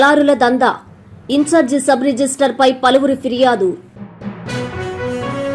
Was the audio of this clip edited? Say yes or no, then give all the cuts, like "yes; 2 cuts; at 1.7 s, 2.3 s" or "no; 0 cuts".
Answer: yes; 1 cut; at 3.9 s